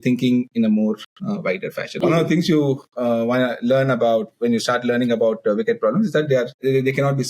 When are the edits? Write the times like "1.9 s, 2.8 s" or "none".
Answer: 2.0 s